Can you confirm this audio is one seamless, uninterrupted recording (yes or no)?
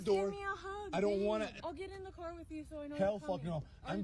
no